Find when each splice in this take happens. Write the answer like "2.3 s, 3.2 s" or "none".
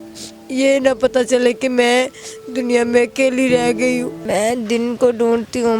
4.2 s